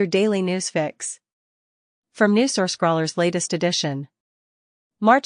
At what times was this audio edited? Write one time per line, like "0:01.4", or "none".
none